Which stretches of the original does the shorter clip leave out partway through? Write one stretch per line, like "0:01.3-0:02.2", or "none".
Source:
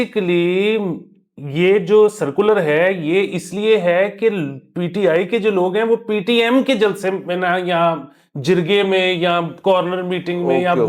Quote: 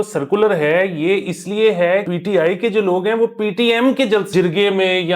0:04.1-0:04.8
0:07.0-0:08.4